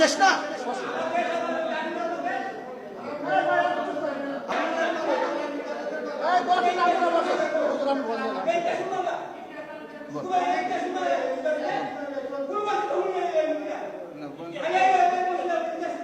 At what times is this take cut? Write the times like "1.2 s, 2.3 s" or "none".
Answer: 4.5 s

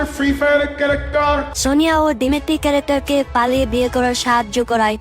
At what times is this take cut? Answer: 1.5 s

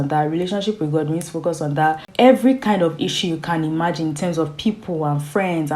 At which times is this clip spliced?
2.1 s

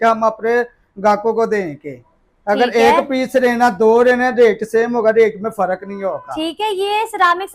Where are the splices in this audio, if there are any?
none

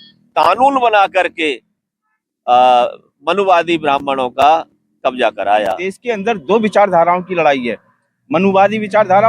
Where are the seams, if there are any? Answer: 5.9 s

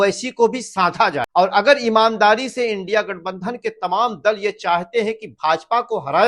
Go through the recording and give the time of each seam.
1.2 s

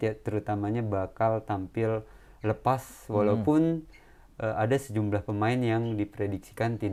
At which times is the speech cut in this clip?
none

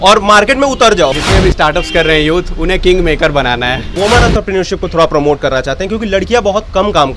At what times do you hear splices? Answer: 1.1 s, 3.9 s

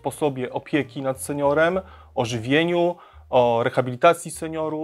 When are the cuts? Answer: none

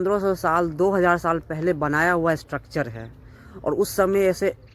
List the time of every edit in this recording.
none

